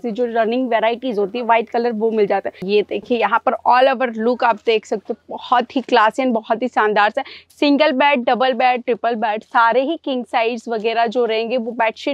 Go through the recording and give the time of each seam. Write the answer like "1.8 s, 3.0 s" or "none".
2.6 s